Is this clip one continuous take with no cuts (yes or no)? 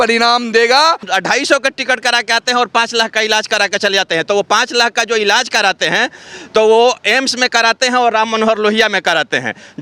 no